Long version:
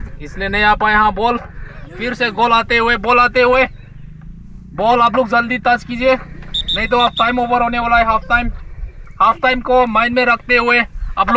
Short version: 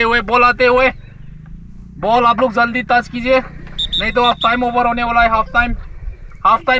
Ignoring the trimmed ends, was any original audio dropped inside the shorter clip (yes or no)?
no